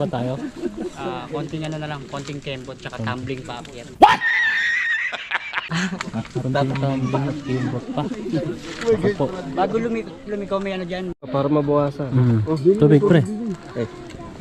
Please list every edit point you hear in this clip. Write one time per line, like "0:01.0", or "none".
0:03.9
0:05.7
0:11.1